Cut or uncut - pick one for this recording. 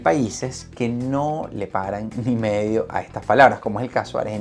uncut